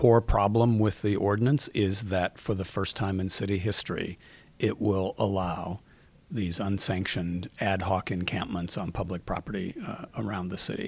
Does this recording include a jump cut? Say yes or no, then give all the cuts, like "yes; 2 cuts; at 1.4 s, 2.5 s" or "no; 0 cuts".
no; 0 cuts